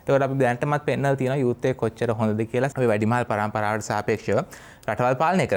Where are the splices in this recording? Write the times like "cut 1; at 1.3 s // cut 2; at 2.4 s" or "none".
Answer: none